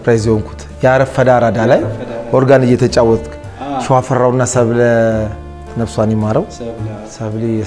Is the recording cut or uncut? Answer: uncut